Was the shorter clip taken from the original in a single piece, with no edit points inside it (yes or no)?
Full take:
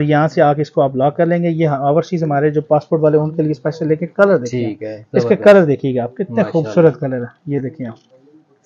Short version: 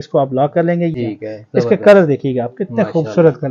no